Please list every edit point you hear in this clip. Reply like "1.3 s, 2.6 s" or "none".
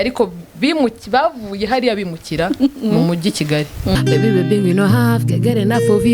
4.0 s